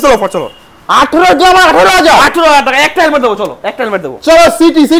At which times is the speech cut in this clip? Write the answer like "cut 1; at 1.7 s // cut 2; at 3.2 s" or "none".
none